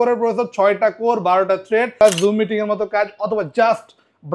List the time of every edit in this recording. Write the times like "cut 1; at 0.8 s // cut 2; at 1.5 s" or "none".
cut 1; at 2.0 s